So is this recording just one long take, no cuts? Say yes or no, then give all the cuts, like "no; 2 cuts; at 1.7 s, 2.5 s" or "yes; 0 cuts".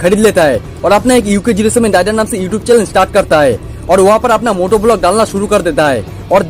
yes; 0 cuts